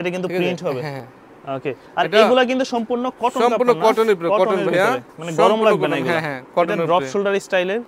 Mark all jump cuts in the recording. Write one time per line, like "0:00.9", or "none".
none